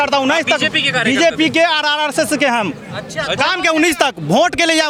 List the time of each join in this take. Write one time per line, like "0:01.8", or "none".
none